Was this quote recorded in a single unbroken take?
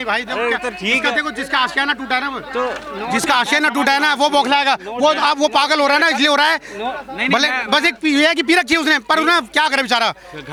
yes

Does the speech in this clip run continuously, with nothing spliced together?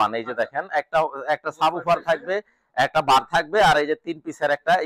yes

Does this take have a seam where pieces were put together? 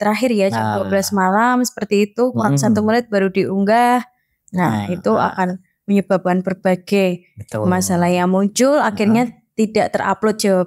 no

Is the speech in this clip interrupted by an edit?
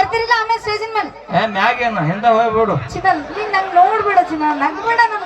no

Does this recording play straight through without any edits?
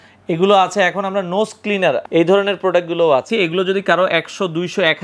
no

